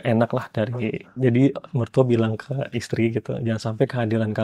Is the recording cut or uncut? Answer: cut